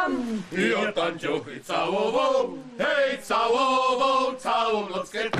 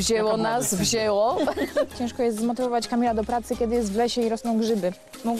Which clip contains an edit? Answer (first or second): second